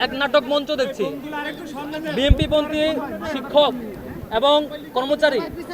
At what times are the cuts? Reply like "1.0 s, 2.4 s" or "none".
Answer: none